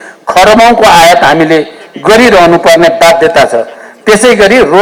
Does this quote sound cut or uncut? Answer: uncut